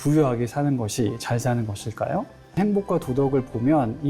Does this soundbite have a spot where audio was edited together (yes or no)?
yes